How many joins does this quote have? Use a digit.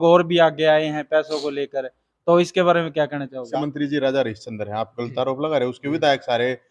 1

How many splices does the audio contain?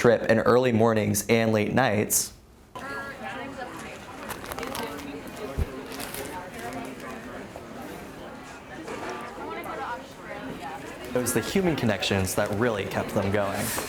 0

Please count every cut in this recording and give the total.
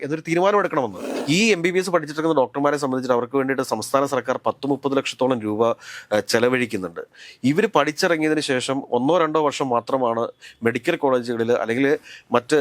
1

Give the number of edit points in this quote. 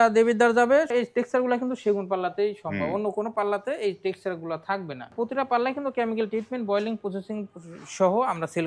2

